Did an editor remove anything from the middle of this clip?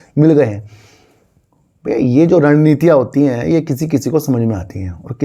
no; 0 cuts

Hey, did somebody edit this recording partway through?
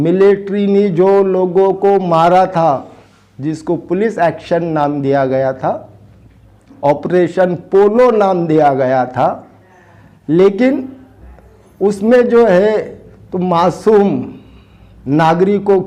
no; 0 cuts

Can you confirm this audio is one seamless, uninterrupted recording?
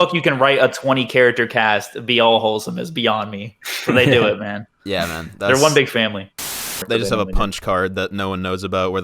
no; 1 cut; at 6.8 s

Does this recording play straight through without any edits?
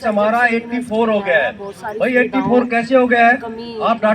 yes; 0 cuts

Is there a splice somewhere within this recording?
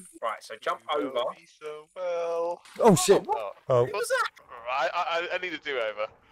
yes; 1 cut; at 2.7 s

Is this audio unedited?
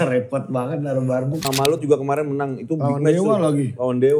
no; 1 cut; at 1.5 s

